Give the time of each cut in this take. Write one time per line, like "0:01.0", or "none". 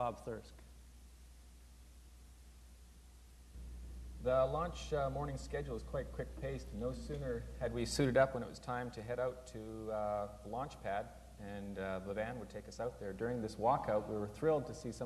0:08.7